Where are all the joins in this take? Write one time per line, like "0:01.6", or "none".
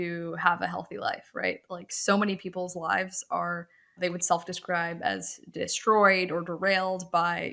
0:04.0

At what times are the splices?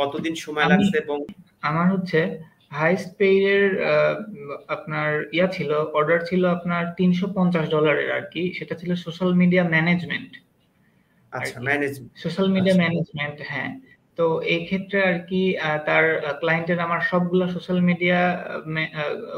0:01.4

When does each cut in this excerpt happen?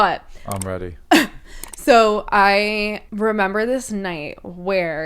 0:03.0

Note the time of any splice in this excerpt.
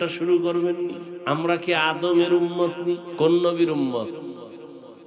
0:01.1
0:03.1

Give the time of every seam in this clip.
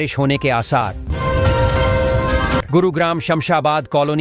0:01.0
0:02.7

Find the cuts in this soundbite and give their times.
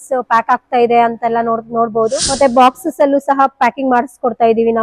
0:02.2

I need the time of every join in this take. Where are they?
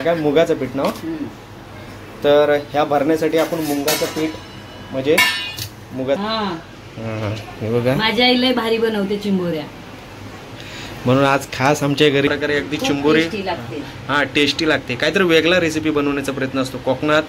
0:06.2
0:12.3

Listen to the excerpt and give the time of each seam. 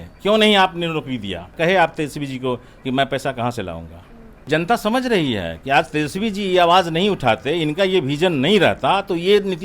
0:01.5
0:04.5

